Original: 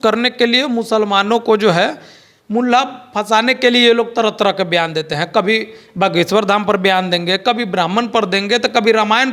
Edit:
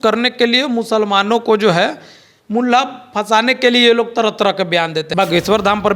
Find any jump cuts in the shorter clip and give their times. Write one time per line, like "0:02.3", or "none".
0:05.0